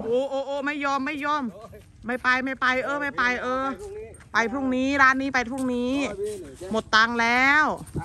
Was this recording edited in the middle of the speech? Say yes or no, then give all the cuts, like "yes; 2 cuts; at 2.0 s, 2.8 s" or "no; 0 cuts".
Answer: no; 0 cuts